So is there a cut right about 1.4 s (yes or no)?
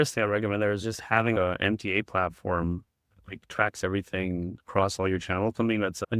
yes